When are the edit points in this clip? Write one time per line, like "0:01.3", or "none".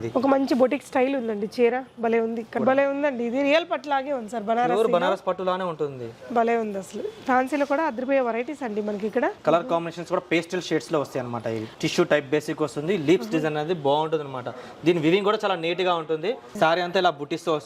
0:02.5
0:09.4
0:16.5